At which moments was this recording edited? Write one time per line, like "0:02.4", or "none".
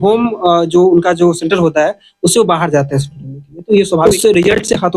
0:04.0